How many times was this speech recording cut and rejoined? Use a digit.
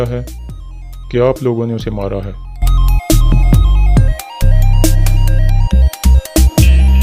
1